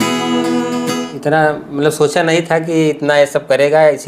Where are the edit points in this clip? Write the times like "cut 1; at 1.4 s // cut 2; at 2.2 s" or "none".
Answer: cut 1; at 0.9 s